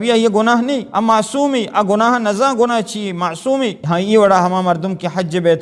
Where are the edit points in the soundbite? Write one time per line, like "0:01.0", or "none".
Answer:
0:00.9
0:03.8